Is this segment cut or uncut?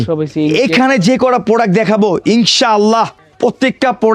cut